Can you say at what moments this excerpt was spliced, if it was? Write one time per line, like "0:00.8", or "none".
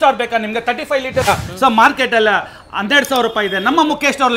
0:01.3